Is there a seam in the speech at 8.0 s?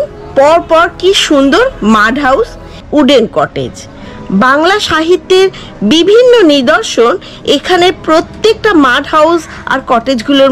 no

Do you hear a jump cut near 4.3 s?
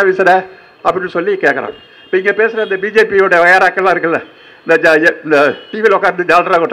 no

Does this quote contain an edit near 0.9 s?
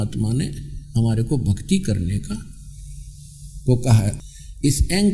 no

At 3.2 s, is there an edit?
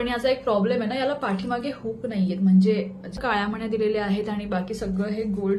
yes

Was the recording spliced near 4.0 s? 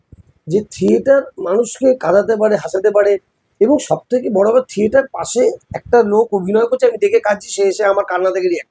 no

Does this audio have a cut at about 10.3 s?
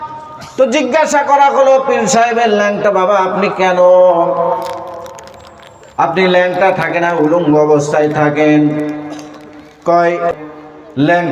yes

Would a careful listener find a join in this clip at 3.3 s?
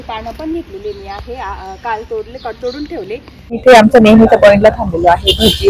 yes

